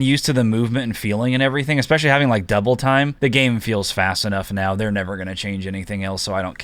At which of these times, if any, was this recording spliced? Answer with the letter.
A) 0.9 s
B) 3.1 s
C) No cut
B